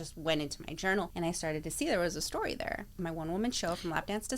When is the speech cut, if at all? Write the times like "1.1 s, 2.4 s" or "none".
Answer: 1.1 s, 3.0 s